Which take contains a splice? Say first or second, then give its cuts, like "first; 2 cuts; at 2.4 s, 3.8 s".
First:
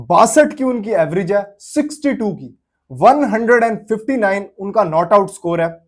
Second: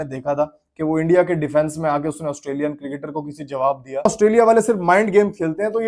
second; 1 cut; at 4.1 s